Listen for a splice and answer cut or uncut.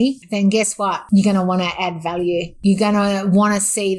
cut